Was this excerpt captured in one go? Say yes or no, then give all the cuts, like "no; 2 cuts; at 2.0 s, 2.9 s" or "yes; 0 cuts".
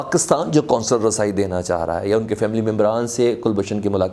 yes; 0 cuts